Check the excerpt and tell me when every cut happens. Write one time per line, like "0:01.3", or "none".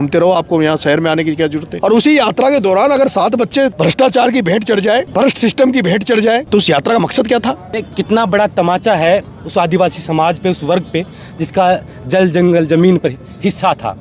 0:01.7
0:03.7
0:05.1
0:06.5
0:07.7